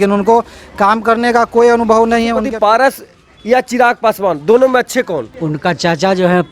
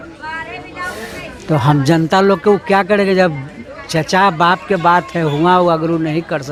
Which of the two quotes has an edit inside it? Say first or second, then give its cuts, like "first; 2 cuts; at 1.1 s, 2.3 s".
first; 2 cuts; at 2.4 s, 5.3 s